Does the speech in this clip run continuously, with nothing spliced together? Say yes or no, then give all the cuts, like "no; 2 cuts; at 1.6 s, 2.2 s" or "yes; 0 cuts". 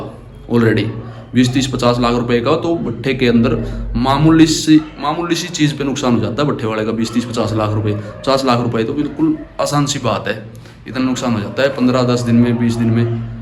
yes; 0 cuts